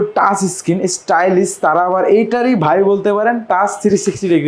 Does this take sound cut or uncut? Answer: uncut